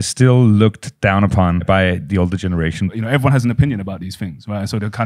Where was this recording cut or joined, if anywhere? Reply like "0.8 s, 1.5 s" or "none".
1.6 s, 2.9 s